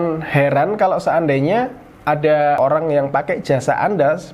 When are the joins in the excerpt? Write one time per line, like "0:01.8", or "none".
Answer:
0:02.6